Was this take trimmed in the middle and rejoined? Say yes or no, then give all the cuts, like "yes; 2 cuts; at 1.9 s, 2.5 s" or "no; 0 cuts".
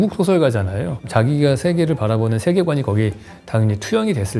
yes; 1 cut; at 1.1 s